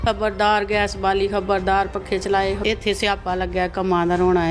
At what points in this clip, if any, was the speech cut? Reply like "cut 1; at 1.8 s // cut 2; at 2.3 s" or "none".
cut 1; at 2.6 s